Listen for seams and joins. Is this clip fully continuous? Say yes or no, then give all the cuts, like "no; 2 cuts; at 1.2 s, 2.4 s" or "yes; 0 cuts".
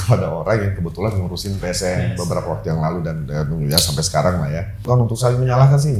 no; 1 cut; at 4.8 s